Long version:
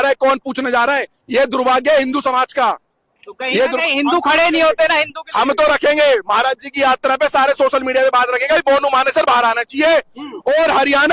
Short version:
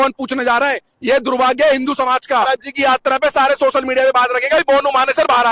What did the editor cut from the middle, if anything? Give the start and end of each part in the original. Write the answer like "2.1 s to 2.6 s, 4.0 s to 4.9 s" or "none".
2.7 s to 6.4 s